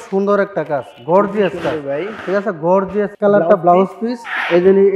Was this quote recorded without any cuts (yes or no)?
no